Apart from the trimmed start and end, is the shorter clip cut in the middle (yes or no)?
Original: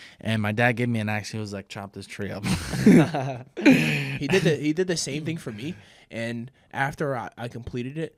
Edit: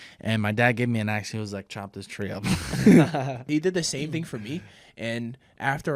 yes